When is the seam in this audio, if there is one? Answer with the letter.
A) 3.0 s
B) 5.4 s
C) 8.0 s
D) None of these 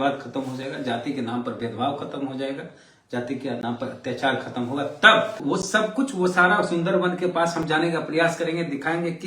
B